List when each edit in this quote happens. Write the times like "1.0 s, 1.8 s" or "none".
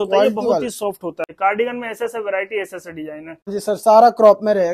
1.3 s, 3.5 s

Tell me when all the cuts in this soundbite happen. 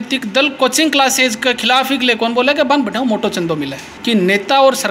3.9 s

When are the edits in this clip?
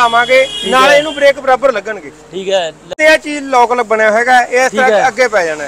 2.9 s

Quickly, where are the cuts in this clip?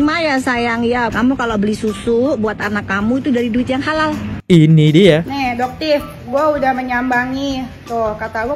1.1 s, 4.4 s

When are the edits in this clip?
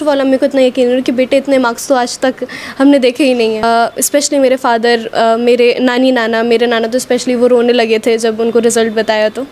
3.6 s

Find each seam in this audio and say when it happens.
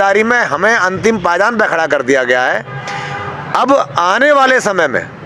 none

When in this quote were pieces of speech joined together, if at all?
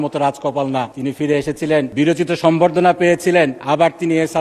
0.9 s, 1.9 s, 3.6 s

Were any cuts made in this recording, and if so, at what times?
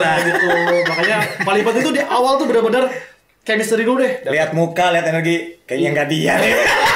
none

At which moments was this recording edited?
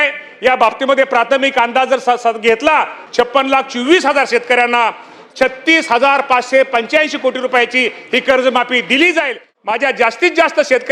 3.0 s, 9.5 s

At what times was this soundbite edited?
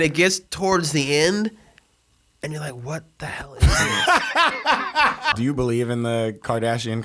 5.3 s

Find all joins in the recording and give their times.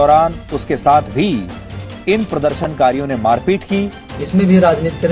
4.1 s

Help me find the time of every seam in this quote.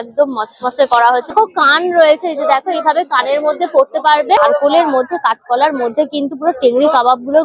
1.3 s, 4.4 s

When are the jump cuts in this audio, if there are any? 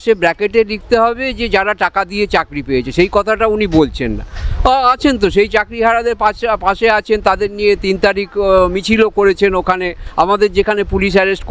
none

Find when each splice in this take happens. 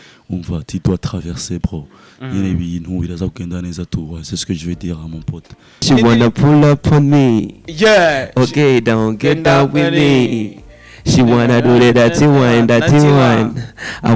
5.8 s

